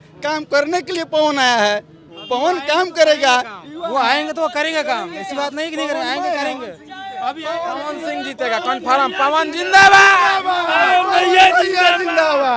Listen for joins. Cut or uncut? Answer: uncut